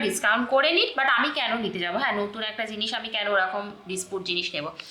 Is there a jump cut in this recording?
no; 0 cuts

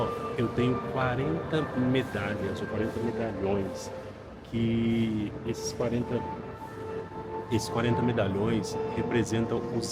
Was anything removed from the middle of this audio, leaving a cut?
no; 0 cuts

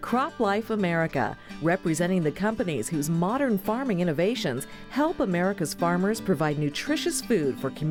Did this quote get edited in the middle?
no; 0 cuts

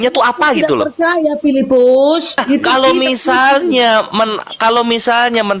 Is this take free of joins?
no; 1 cut; at 2.4 s

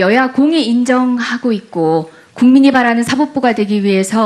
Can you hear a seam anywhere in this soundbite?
no; 0 cuts

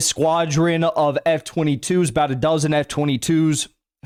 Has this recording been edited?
no; 0 cuts

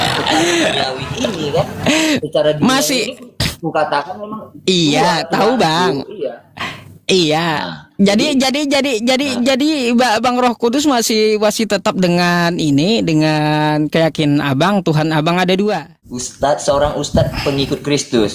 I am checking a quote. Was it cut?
yes; 1 cut; at 16.3 s

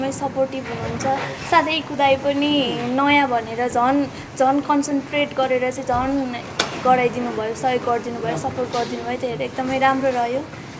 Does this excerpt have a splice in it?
no; 0 cuts

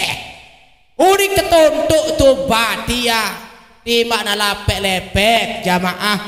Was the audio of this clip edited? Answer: no; 0 cuts

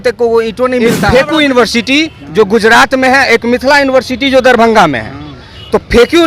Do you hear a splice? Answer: yes; 1 cut; at 1.0 s

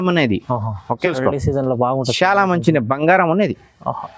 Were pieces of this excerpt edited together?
yes; 1 cut; at 1.1 s

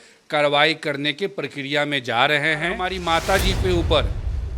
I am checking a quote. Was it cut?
yes; 1 cut; at 2.9 s

